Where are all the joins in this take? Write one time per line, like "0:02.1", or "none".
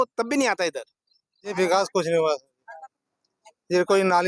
0:01.5